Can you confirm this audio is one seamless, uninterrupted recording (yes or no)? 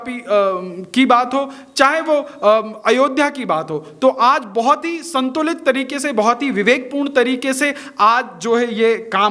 yes